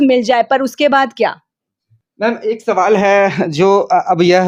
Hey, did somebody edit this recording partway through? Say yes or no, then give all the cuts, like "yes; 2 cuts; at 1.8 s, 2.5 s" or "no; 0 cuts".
no; 0 cuts